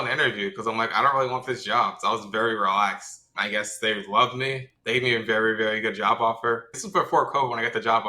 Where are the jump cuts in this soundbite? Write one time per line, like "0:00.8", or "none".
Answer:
0:03.3
0:04.7
0:06.8